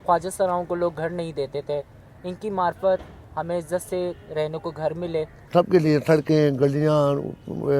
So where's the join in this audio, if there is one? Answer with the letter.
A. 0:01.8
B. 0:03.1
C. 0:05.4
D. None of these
C